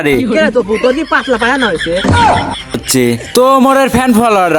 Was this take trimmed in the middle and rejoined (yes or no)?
yes